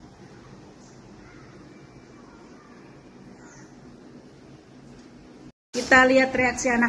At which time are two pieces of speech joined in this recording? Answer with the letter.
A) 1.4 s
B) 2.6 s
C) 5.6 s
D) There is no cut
C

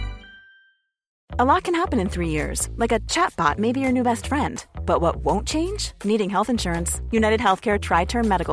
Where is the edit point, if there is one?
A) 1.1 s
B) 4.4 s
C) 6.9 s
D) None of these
A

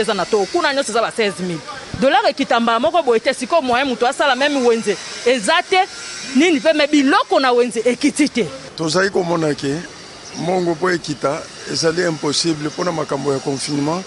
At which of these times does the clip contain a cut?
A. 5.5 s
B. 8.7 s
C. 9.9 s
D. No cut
B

